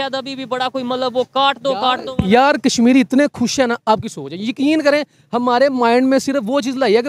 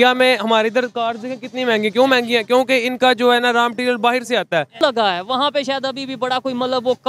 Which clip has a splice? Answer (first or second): second